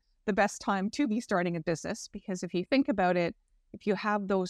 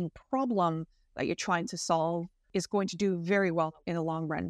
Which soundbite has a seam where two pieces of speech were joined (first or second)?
second